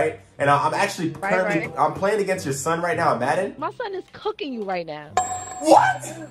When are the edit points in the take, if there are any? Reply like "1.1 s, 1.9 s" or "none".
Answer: 3.7 s